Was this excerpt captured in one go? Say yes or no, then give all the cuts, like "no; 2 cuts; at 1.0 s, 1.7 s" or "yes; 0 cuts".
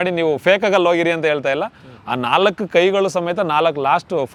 yes; 0 cuts